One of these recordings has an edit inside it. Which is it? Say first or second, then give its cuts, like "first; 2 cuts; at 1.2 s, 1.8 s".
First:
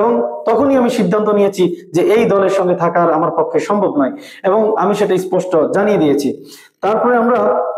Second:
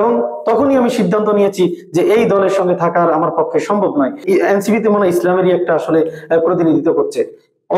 second; 1 cut; at 4.2 s